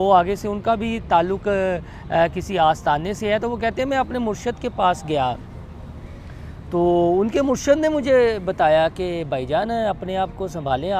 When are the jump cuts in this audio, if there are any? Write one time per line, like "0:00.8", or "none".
none